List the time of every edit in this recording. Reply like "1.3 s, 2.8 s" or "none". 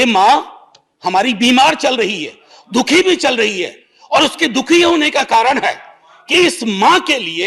none